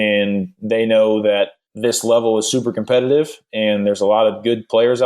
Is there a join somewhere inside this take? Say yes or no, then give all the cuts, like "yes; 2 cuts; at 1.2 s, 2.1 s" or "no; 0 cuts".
yes; 1 cut; at 1.6 s